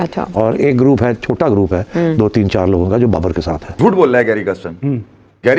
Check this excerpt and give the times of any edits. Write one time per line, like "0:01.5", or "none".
0:03.7